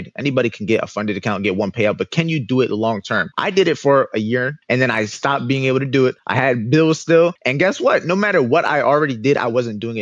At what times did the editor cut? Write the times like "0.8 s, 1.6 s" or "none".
3.3 s, 4.6 s, 6.2 s, 7.4 s